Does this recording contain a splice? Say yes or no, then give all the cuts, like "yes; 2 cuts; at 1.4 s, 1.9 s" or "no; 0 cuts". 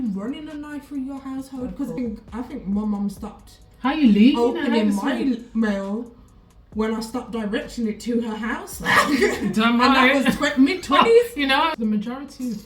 yes; 2 cuts; at 2.0 s, 11.7 s